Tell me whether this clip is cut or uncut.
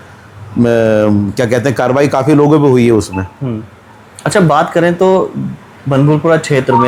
uncut